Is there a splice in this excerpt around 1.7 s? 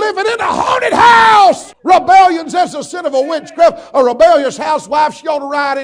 yes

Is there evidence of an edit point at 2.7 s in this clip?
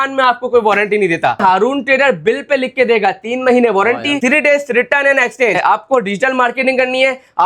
no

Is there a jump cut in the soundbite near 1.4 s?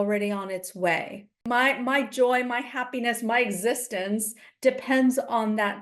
yes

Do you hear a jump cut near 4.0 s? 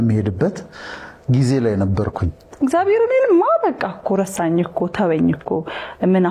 no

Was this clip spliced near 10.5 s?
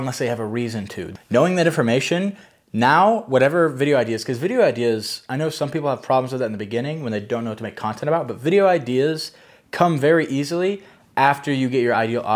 no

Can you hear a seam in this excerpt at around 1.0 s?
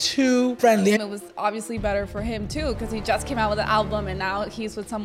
yes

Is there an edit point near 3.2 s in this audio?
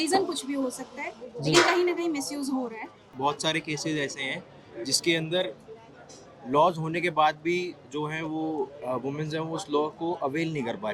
yes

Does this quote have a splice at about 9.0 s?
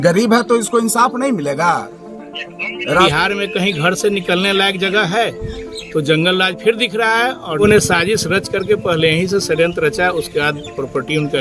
no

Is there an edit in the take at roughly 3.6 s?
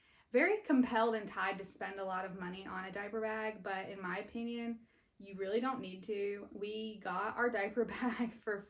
no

